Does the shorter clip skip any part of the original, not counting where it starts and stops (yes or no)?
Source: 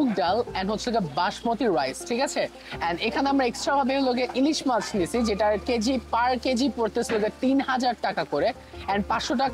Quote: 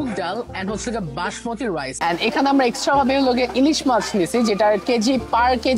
yes